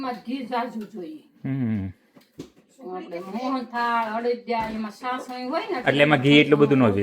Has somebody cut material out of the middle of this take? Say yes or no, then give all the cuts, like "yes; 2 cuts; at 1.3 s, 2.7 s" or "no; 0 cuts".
no; 0 cuts